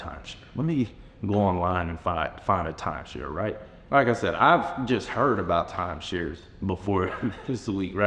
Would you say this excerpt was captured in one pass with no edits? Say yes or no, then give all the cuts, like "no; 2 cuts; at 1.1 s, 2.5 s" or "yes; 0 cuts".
yes; 0 cuts